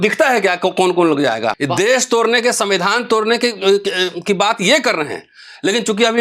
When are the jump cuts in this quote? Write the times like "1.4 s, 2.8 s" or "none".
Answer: 1.6 s